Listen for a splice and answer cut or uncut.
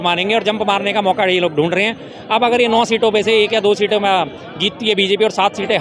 uncut